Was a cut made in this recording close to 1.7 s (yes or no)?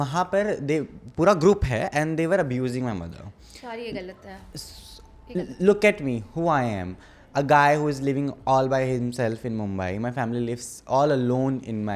no